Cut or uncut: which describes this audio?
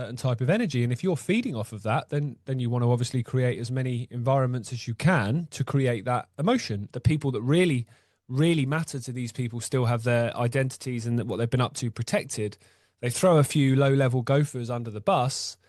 cut